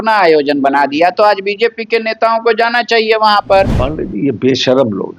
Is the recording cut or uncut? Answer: cut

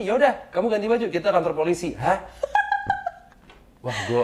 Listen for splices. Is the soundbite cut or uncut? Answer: uncut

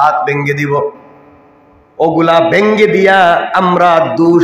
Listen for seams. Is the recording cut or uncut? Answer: uncut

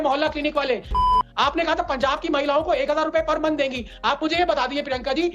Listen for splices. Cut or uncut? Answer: cut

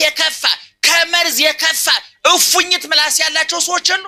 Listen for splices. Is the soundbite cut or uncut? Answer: uncut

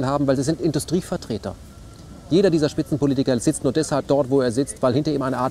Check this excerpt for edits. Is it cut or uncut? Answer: cut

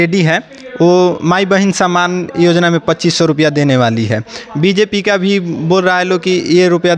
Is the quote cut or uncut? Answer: uncut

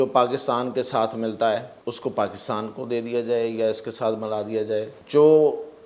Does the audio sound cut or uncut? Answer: cut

